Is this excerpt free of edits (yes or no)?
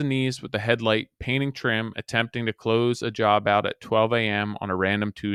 yes